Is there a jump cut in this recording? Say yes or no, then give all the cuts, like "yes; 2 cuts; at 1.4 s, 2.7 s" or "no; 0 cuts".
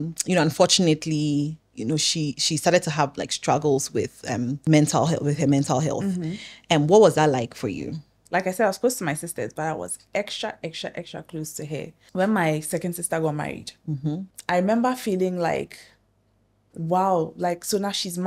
yes; 4 cuts; at 4.6 s, 8.1 s, 12.0 s, 14.3 s